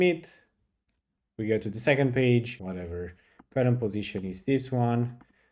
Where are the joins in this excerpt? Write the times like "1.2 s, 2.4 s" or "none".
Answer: 2.6 s

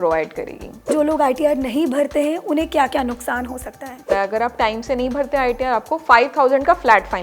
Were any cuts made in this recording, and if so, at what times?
0.9 s, 4.1 s

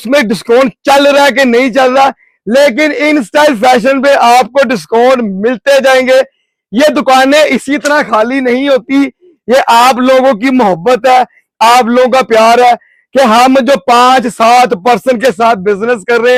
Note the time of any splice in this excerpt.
none

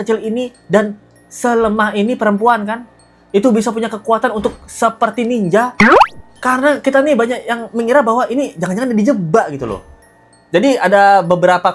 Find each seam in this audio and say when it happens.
none

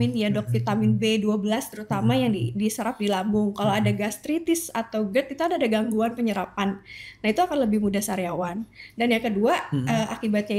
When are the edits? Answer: none

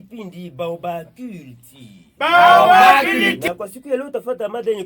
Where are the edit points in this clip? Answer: 3.5 s

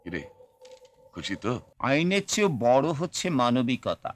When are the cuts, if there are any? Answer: 1.7 s

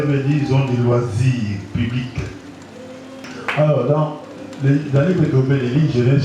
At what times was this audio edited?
3.2 s

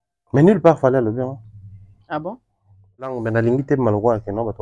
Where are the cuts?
3.2 s

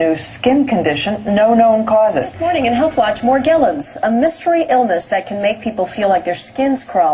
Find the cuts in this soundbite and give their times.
5.9 s

